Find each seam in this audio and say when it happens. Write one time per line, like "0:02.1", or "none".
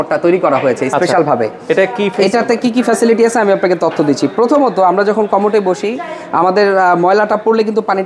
none